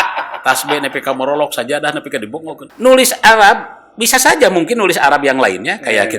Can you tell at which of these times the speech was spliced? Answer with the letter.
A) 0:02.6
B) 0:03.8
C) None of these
A